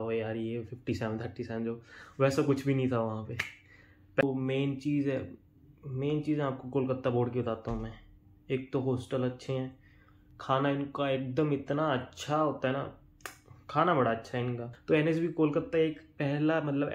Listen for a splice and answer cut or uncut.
cut